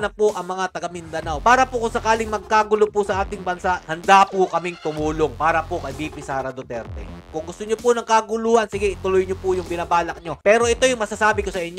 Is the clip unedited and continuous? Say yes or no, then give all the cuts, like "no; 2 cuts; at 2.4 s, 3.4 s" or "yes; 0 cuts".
yes; 0 cuts